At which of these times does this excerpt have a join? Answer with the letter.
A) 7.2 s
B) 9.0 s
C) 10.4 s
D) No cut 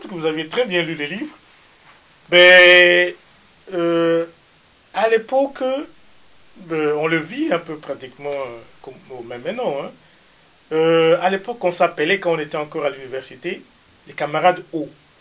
D